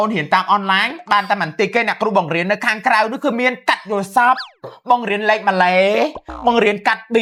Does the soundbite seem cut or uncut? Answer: uncut